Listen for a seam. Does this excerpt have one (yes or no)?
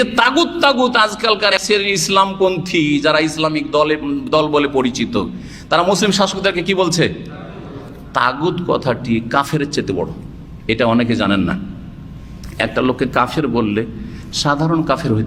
yes